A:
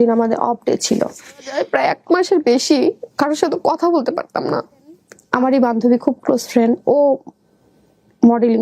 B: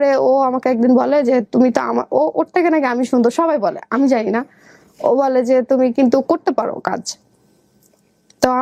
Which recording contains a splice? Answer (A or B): A